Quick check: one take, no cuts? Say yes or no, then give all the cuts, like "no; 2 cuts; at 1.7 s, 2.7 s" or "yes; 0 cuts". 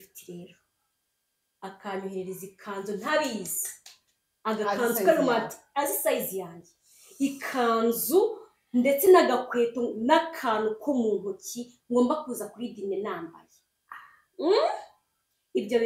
yes; 0 cuts